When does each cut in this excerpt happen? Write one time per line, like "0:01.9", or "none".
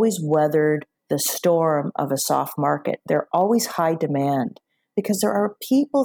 0:00.9